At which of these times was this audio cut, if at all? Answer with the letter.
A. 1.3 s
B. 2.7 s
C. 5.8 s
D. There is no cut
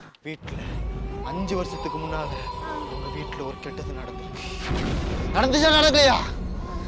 D